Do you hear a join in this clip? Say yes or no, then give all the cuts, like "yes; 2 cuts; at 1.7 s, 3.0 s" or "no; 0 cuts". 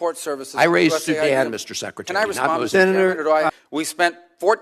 yes; 1 cut; at 3.5 s